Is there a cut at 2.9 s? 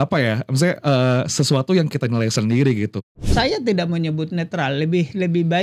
yes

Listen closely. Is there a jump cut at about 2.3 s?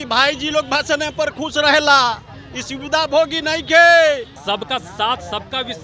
no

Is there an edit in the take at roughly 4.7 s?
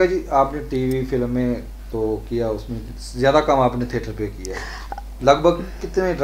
no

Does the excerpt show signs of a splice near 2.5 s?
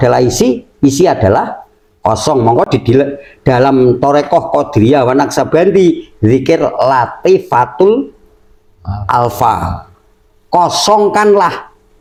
no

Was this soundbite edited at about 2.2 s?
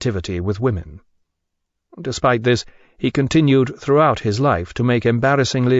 yes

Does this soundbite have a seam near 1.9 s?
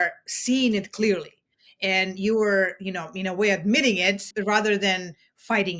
no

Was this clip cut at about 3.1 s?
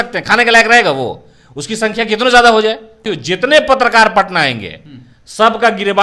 yes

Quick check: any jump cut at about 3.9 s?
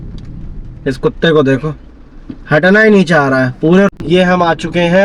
yes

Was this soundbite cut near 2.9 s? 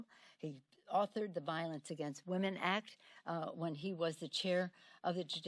yes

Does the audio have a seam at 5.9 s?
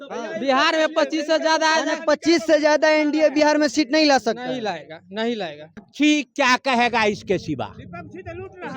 yes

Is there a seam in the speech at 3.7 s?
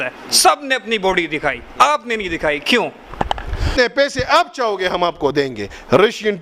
yes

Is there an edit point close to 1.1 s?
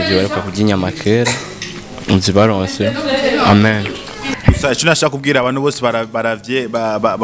no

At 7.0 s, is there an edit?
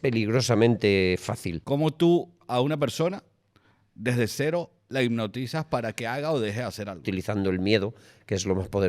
yes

